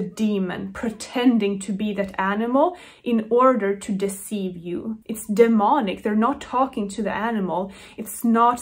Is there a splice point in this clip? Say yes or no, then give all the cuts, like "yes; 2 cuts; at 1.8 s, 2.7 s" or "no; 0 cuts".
yes; 1 cut; at 5.0 s